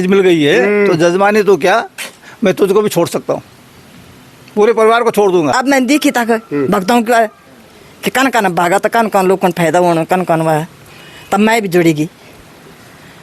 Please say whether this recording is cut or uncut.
cut